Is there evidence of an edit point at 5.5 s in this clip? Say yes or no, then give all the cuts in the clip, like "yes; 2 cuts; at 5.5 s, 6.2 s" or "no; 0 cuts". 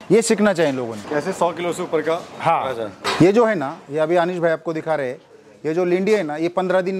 no; 2 cuts; at 1.0 s, 2.9 s